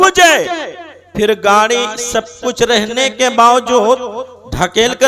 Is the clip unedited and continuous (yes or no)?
yes